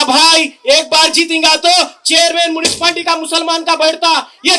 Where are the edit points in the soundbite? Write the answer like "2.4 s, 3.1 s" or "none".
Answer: none